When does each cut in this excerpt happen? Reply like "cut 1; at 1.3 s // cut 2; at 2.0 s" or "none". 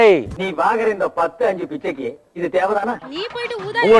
cut 1; at 3.0 s